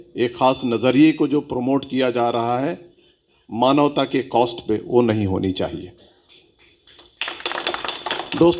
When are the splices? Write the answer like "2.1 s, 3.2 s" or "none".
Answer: none